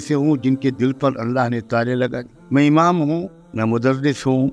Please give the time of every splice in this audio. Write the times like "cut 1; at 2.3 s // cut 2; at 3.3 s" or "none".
cut 1; at 2.3 s // cut 2; at 3.4 s